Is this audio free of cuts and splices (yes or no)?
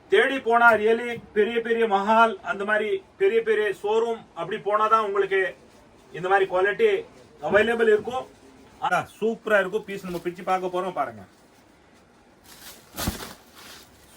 no